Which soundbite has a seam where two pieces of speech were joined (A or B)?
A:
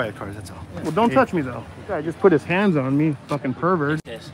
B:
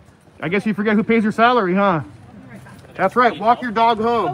A